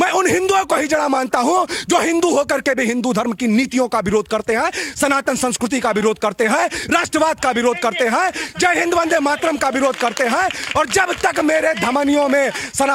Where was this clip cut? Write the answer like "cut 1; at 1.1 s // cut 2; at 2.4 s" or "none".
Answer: none

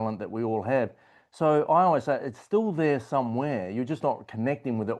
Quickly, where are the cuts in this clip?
none

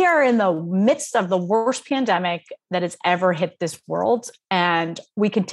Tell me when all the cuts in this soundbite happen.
none

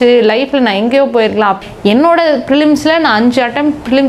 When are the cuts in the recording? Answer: cut 1; at 1.6 s

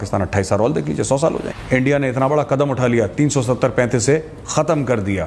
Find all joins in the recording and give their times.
cut 1; at 1.6 s

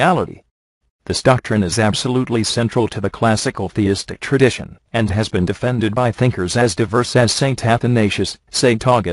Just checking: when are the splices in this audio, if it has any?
cut 1; at 6.5 s

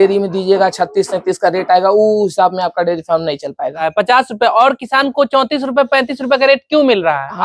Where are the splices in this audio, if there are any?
cut 1; at 3.9 s

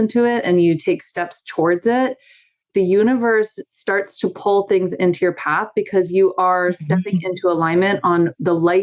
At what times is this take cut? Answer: cut 1; at 2.7 s

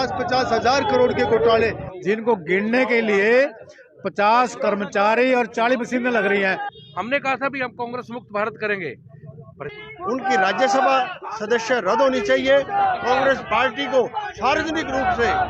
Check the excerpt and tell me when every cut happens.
cut 1; at 1.9 s // cut 2; at 6.7 s // cut 3; at 9.7 s

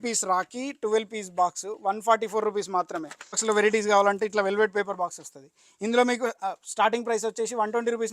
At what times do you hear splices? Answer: cut 1; at 3.4 s

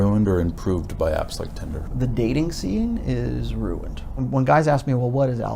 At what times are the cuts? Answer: cut 1; at 1.9 s // cut 2; at 4.2 s

